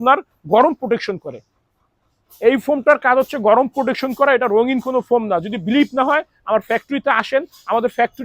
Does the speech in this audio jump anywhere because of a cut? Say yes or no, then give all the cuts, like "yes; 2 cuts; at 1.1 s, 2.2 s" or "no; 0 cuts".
no; 0 cuts